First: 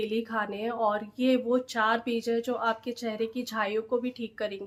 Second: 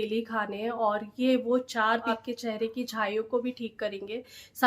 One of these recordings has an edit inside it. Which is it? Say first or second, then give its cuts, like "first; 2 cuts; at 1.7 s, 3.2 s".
second; 1 cut; at 2.1 s